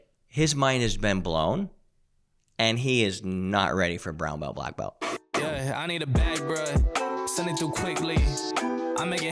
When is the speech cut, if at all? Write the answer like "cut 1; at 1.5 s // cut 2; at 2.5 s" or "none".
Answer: cut 1; at 5.0 s

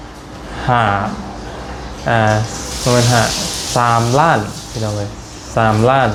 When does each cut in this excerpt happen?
none

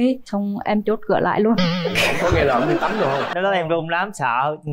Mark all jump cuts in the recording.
cut 1; at 3.3 s

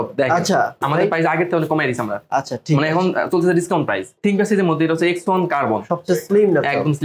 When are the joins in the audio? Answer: cut 1; at 0.9 s // cut 2; at 4.2 s

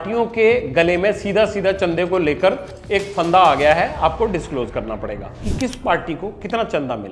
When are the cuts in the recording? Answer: cut 1; at 5.4 s

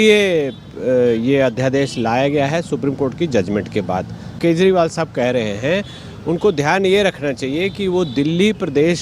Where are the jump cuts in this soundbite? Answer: cut 1; at 4.3 s

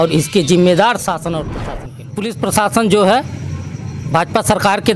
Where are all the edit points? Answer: cut 1; at 1.5 s

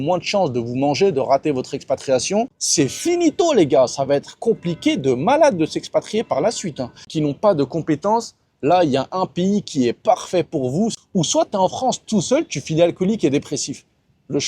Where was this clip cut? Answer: cut 1; at 2.6 s // cut 2; at 7.1 s // cut 3; at 11.0 s

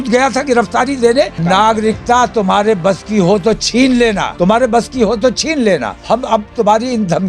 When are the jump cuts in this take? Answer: cut 1; at 1.4 s // cut 2; at 4.3 s // cut 3; at 5.9 s

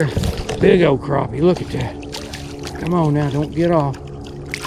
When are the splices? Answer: none

